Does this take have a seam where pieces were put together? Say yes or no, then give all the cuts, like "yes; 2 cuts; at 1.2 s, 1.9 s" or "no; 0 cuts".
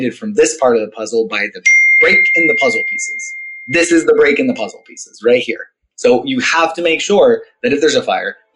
no; 0 cuts